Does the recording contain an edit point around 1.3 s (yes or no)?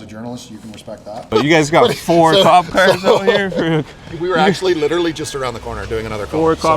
yes